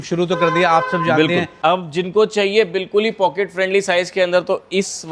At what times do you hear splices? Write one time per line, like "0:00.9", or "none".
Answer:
0:01.5